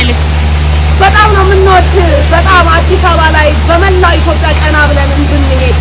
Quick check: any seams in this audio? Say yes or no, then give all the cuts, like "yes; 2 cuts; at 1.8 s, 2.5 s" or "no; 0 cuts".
no; 0 cuts